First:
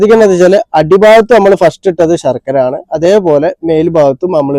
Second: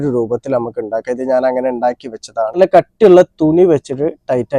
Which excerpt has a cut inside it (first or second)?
second